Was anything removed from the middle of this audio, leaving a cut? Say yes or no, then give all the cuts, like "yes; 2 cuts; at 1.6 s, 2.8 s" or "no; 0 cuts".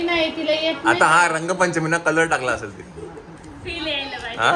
no; 0 cuts